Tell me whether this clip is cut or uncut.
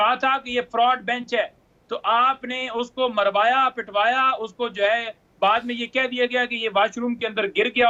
uncut